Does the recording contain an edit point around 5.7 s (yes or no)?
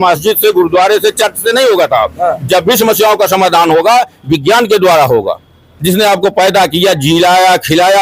yes